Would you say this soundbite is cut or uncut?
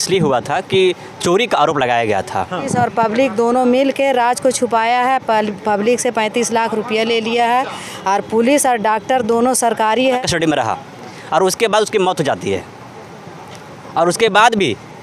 cut